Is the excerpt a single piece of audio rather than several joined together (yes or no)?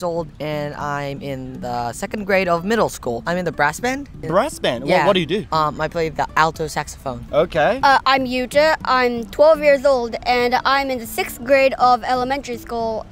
yes